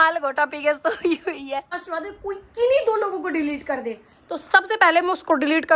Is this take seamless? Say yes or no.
no